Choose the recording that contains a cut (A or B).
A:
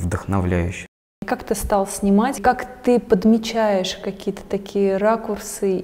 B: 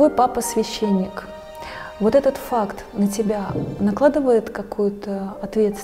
A